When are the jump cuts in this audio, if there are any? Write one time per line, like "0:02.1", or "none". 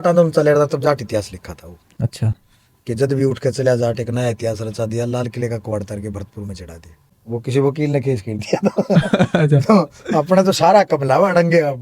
0:07.1